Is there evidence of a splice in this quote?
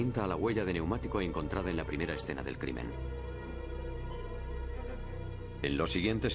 no; 0 cuts

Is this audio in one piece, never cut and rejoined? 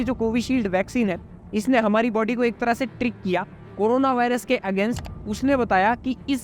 no; 1 cut; at 5.1 s

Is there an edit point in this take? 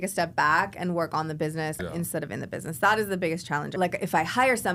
yes; 2 cuts; at 1.8 s, 3.7 s

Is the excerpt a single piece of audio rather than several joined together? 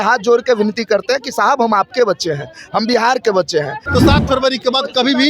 no; 1 cut; at 3.8 s

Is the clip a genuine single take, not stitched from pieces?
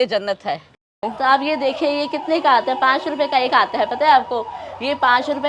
no; 1 cut; at 1.0 s

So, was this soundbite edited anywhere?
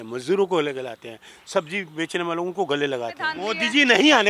yes; 1 cut; at 3.4 s

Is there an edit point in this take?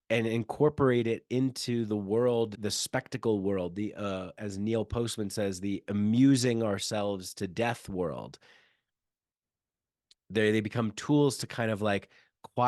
yes; 1 cut; at 2.5 s

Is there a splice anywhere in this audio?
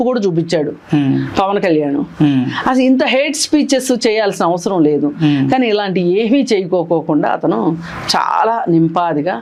no; 0 cuts

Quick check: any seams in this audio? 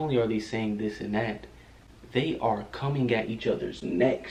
no; 0 cuts

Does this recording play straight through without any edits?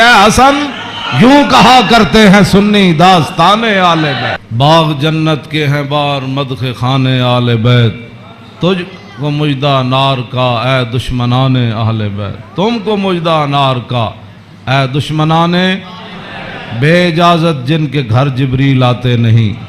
no; 1 cut; at 4.5 s

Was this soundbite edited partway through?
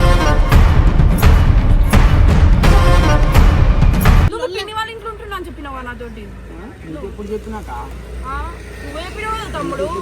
yes; 1 cut; at 4.3 s

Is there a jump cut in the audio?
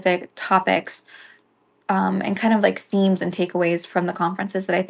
no; 0 cuts

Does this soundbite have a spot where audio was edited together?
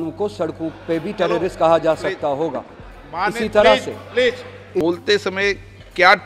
yes; 1 cut; at 4.8 s

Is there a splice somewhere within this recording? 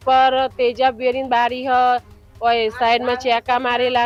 no; 0 cuts

